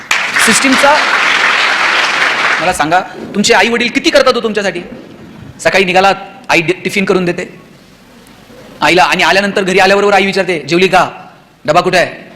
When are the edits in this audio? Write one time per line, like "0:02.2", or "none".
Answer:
0:02.6